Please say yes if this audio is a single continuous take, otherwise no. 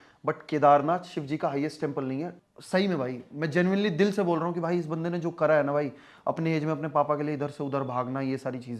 no